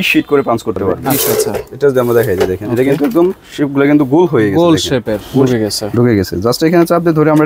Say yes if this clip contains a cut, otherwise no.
yes